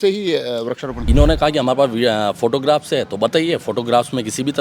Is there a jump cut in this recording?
yes; 1 cut; at 1.1 s

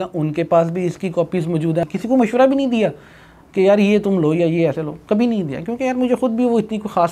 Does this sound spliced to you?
yes; 1 cut; at 1.8 s

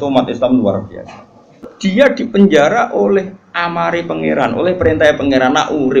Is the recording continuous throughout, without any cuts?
no; 1 cut; at 1.7 s

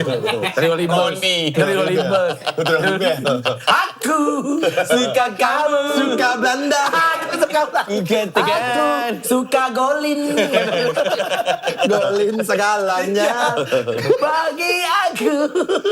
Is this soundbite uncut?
yes; 0 cuts

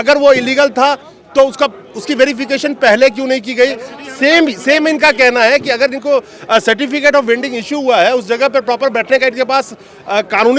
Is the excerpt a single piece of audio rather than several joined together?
yes; 0 cuts

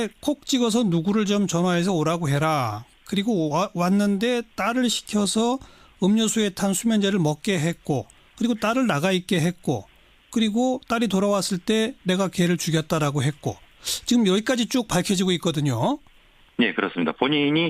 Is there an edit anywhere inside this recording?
yes; 1 cut; at 11.3 s

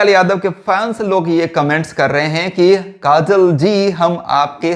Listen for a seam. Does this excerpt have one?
no; 0 cuts

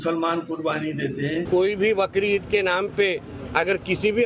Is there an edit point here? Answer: yes; 1 cut; at 1.4 s

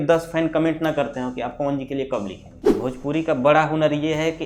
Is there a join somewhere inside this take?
yes; 1 cut; at 2.7 s

